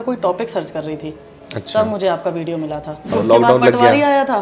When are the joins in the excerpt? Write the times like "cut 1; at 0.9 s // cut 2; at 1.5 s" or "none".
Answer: cut 1; at 3.1 s